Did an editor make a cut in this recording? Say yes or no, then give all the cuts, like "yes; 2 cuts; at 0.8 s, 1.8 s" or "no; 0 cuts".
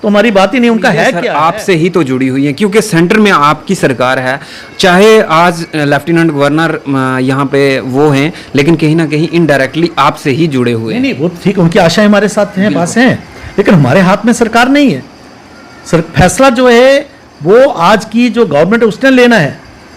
yes; 1 cut; at 1.2 s